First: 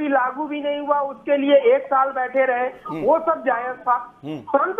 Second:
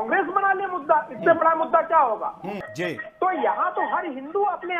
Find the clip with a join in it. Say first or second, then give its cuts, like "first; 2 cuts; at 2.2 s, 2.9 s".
second; 1 cut; at 2.5 s